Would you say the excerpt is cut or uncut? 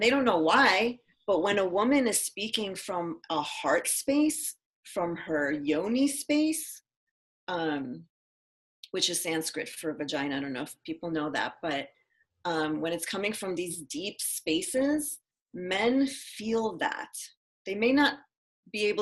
uncut